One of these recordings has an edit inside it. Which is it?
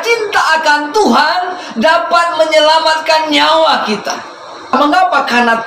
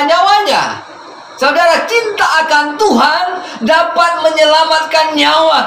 first; 1 cut; at 4.7 s

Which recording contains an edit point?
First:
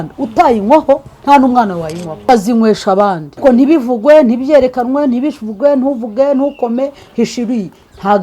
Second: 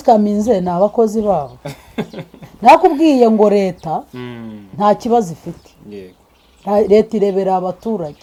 first; 2 cuts; at 2.2 s, 3.4 s

